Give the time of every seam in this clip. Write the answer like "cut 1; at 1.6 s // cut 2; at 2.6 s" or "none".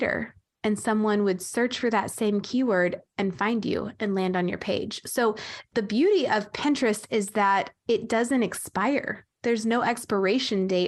none